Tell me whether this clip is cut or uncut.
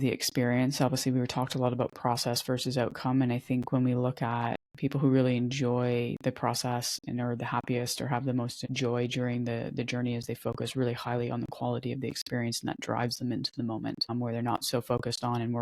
cut